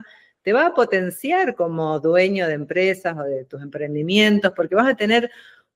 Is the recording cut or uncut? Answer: uncut